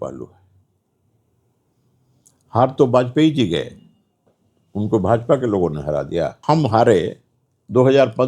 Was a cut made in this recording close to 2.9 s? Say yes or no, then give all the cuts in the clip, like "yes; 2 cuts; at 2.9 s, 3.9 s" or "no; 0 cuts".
no; 1 cut; at 6.4 s